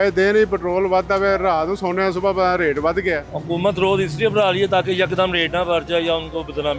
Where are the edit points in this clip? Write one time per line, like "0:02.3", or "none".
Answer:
0:03.3